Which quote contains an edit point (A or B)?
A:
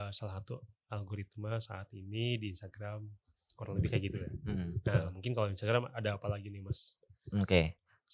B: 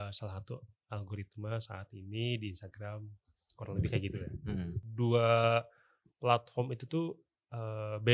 B